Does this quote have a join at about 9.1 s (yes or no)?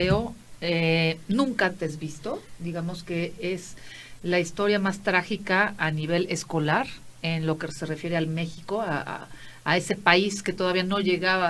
no